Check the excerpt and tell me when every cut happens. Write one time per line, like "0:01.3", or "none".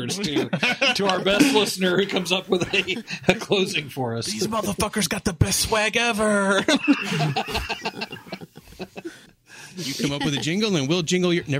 0:09.3